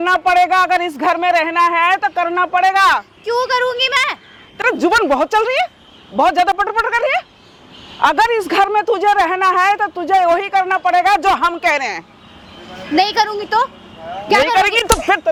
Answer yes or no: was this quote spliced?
no